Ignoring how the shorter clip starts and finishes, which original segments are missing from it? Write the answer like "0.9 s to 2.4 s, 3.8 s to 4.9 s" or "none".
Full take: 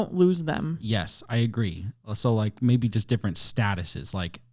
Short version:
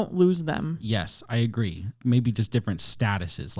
2.0 s to 2.5 s